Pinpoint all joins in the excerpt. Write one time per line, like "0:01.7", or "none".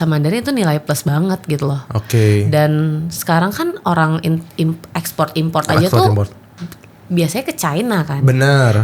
none